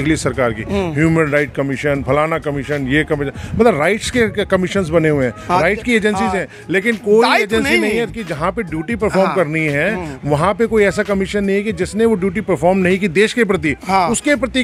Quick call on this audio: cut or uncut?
uncut